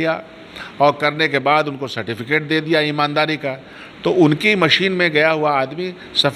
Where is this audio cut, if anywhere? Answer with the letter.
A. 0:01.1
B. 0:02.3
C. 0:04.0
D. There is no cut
D